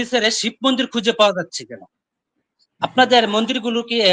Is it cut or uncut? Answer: uncut